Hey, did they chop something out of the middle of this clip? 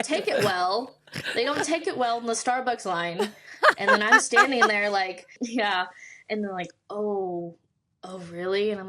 yes; 1 cut; at 5.3 s

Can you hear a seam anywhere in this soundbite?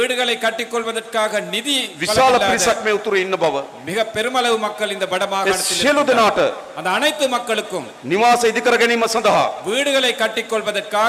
no; 0 cuts

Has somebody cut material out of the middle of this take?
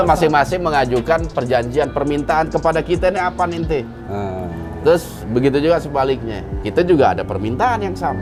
no; 0 cuts

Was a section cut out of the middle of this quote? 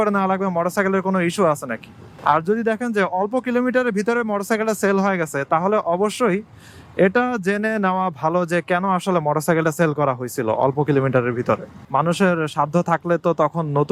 yes; 1 cut; at 11.7 s

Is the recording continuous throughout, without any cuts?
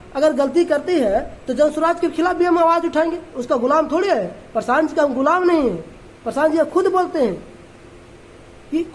yes; 0 cuts

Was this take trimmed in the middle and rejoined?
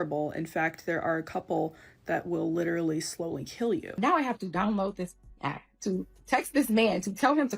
yes; 1 cut; at 3.9 s

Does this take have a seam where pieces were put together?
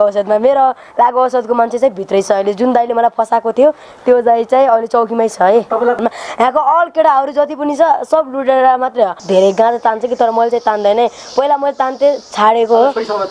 yes; 2 cuts; at 6.0 s, 9.2 s

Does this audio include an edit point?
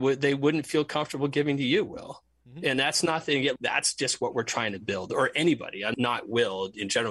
yes; 2 cuts; at 3.5 s, 5.9 s

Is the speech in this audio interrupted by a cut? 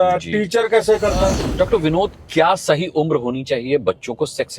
yes; 1 cut; at 1.4 s

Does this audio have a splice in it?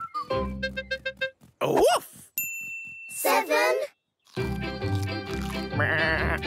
no; 0 cuts

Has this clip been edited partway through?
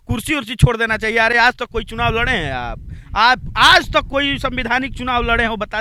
no; 0 cuts

